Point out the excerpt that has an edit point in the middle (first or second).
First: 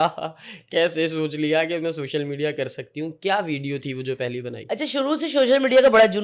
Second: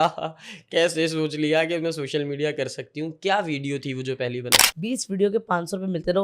second